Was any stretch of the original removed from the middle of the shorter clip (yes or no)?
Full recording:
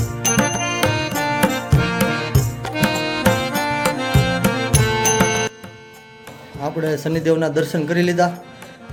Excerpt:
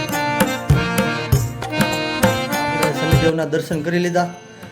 yes